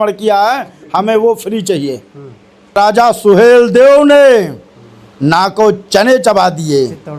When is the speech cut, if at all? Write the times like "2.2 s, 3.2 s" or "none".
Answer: 2.7 s